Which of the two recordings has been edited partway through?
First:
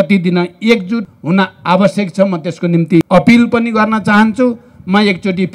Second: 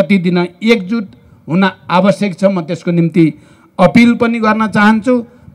first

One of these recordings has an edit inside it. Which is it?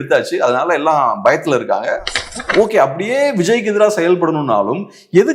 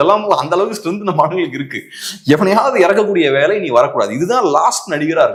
first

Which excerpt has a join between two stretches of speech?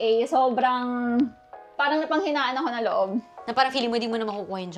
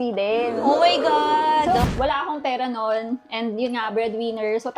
second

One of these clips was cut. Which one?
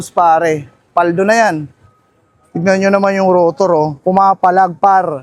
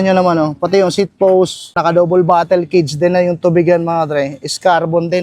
second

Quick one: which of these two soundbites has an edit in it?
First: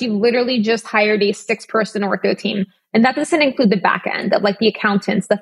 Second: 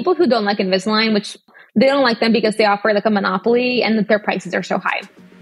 second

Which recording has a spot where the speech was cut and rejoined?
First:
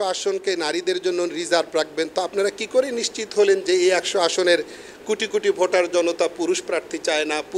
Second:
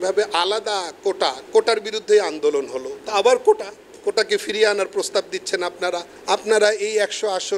second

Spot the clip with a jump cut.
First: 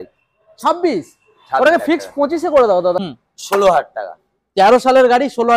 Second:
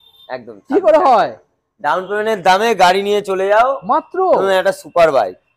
first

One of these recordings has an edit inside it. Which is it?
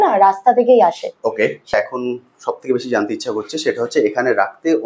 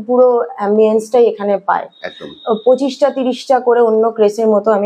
first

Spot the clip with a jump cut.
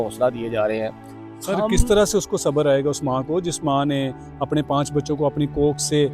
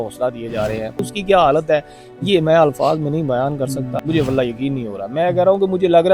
second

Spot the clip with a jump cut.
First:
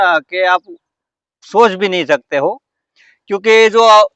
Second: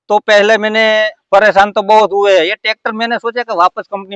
second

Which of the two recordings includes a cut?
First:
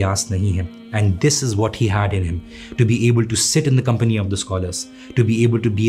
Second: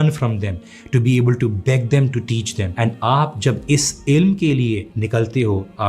second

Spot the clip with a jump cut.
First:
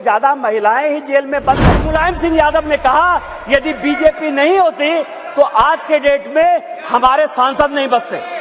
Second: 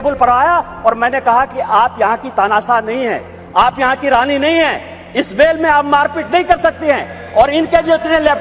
first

